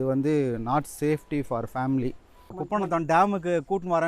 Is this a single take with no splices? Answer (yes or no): no